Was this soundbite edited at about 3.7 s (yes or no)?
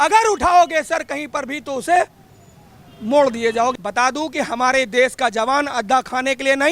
yes